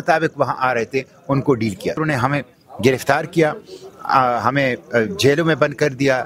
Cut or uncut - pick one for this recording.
cut